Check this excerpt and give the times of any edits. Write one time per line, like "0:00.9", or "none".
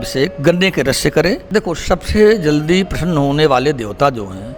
0:01.4